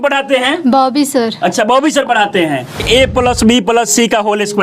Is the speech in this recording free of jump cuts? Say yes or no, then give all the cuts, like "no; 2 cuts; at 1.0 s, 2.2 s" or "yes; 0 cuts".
no; 1 cut; at 2.8 s